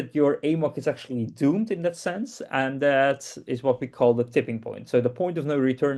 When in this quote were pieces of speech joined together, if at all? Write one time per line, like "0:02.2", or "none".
none